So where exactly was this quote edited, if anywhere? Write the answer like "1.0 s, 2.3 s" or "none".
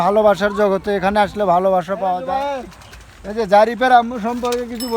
2.3 s